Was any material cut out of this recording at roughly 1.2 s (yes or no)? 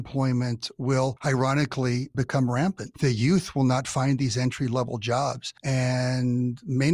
yes